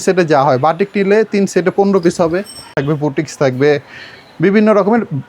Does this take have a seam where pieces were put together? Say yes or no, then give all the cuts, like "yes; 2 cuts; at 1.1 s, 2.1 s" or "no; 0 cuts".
yes; 1 cut; at 2.7 s